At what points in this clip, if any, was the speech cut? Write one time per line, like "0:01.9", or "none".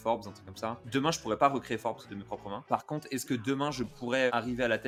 none